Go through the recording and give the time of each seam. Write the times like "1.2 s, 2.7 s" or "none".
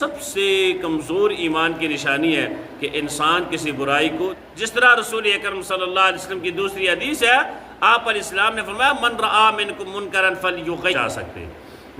4.4 s, 11.0 s